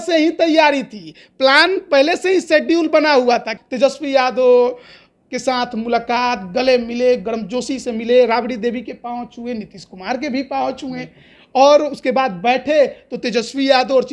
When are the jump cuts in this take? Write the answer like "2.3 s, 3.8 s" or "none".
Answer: 3.6 s